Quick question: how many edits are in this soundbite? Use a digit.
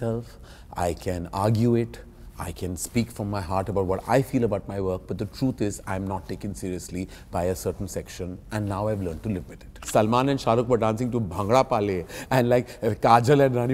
1